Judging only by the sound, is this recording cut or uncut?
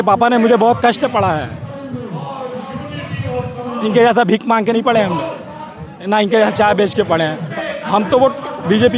cut